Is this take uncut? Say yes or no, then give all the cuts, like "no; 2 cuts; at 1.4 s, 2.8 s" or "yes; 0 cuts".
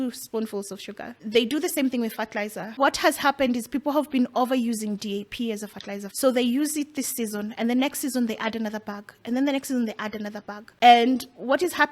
no; 4 cuts; at 1.2 s, 2.8 s, 6.1 s, 10.7 s